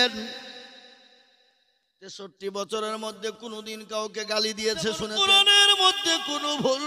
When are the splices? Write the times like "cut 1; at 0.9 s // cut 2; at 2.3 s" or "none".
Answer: cut 1; at 5.1 s